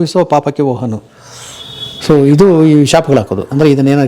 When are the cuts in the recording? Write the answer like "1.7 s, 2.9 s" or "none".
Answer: none